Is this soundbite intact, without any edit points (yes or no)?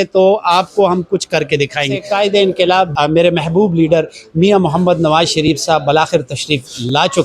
no